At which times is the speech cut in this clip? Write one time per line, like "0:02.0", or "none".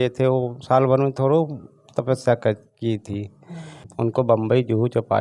0:03.8